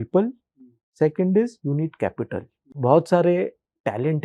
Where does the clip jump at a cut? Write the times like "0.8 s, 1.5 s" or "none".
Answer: 2.7 s